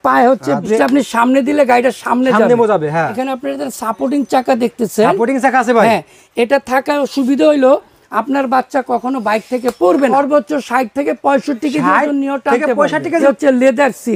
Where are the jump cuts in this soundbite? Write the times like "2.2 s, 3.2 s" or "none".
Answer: 0.8 s, 3.1 s, 10.1 s, 13.2 s